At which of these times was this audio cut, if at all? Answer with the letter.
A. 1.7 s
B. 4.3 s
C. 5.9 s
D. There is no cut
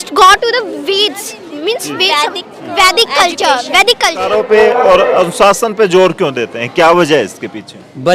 B